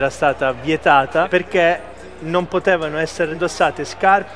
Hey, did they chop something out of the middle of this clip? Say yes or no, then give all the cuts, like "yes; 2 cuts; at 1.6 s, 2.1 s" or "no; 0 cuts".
yes; 2 cuts; at 1.3 s, 3.4 s